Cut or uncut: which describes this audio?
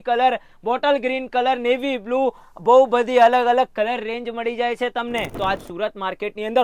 cut